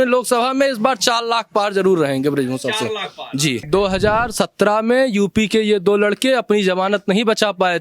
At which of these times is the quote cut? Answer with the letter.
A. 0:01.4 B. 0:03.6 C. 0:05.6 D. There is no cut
B